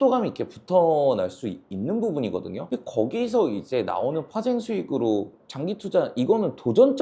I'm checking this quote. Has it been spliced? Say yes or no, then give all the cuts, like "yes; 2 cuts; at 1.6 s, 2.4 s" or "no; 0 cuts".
no; 0 cuts